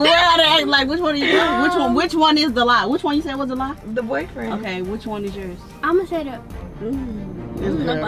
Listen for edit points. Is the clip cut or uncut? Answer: uncut